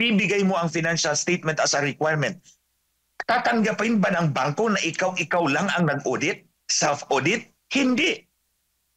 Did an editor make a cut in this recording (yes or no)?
no